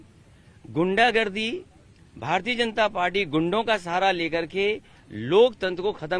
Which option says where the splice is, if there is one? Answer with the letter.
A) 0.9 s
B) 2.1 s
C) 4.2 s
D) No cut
D